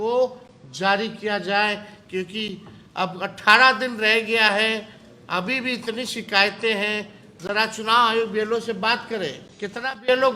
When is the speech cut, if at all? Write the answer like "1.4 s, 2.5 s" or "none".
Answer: 9.5 s